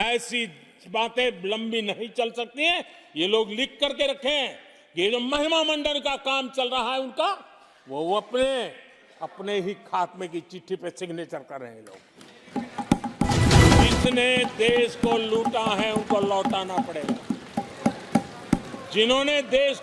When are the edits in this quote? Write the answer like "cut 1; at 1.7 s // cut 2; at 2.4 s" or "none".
cut 1; at 13.6 s